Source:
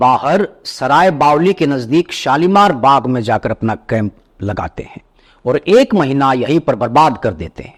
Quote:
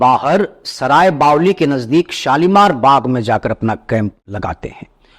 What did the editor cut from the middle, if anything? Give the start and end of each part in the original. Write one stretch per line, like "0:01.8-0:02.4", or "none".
0:04.2-0:04.4